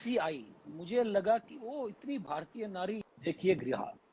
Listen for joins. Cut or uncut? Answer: cut